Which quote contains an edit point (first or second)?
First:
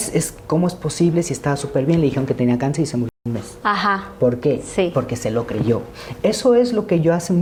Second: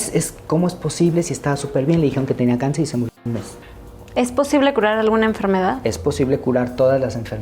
second